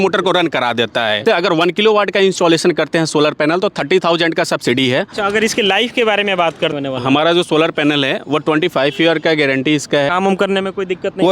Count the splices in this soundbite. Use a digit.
4